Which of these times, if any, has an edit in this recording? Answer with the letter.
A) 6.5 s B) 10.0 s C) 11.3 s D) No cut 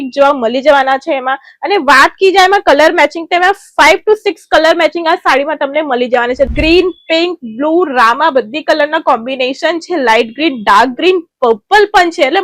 A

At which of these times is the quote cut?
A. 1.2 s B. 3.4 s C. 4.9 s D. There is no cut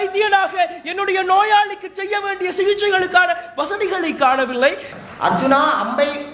C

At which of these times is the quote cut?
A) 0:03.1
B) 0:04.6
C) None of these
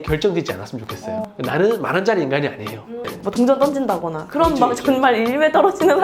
A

